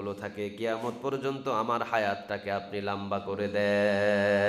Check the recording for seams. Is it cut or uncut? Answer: uncut